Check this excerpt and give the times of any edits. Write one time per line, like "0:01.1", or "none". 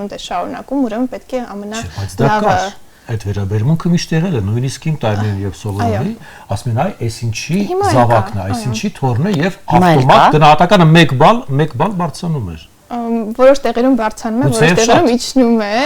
none